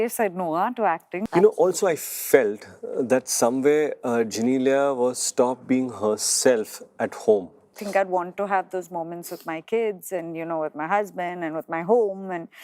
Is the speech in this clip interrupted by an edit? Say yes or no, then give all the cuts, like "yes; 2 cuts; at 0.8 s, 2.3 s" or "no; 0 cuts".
yes; 2 cuts; at 1.2 s, 7.7 s